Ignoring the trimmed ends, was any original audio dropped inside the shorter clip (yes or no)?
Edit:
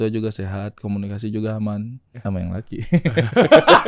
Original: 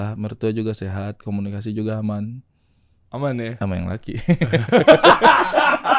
yes